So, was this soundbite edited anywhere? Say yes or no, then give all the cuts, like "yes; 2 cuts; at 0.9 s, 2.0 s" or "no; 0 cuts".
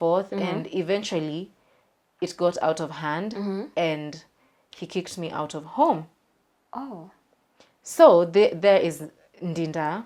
no; 0 cuts